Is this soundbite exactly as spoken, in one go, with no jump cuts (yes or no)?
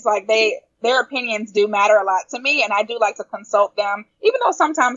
yes